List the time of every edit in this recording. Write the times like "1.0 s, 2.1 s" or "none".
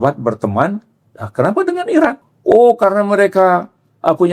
2.3 s